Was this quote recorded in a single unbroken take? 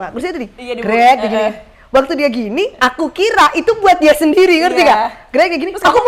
yes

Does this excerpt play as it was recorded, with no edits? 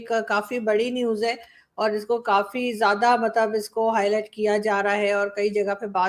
yes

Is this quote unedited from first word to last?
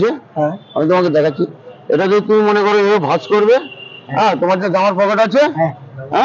yes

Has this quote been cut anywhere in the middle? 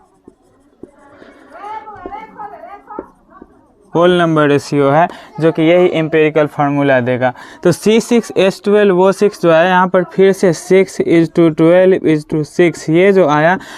yes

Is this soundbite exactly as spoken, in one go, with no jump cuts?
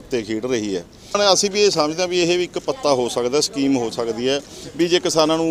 no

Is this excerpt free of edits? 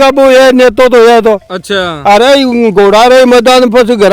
yes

